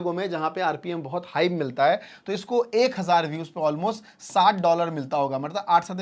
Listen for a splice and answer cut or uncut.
uncut